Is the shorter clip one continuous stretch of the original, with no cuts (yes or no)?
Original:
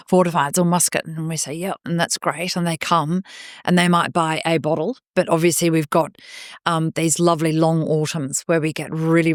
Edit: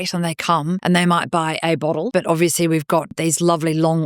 no